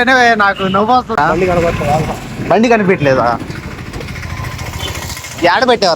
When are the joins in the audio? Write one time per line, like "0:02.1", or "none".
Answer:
0:01.2